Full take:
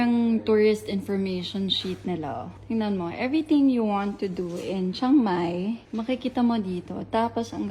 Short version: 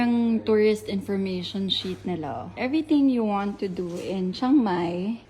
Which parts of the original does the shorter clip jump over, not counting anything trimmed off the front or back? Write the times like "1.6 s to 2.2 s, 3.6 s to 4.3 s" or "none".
2.5 s to 3.1 s